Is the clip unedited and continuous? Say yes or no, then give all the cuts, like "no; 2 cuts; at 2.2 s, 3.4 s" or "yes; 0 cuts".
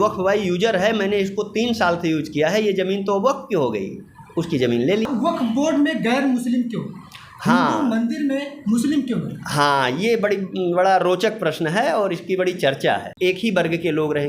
no; 2 cuts; at 5.1 s, 13.1 s